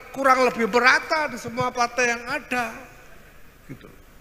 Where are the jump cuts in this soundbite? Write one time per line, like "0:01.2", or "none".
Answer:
none